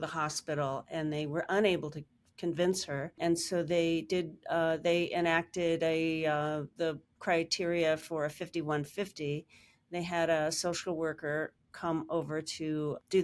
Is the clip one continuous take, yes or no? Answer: yes